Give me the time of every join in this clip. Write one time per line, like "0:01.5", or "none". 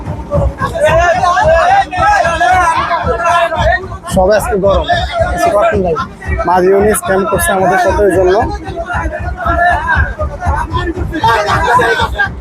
none